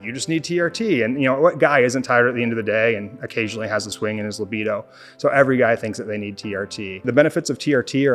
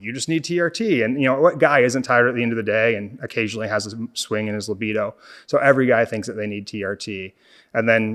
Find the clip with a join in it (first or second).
first